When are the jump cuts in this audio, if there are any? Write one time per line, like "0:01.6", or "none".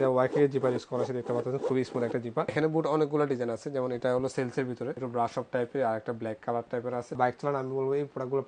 0:02.5
0:05.0
0:07.2